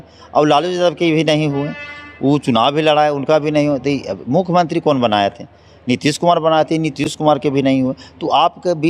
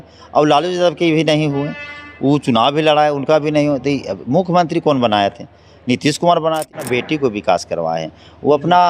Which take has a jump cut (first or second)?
second